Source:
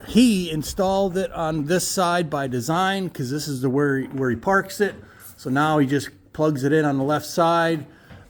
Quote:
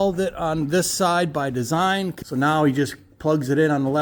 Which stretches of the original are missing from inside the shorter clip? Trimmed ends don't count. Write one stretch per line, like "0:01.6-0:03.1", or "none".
0:03.2-0:05.3